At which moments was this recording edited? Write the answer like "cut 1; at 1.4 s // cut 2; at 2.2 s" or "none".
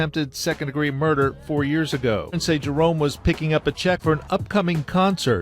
cut 1; at 2.4 s // cut 2; at 4.0 s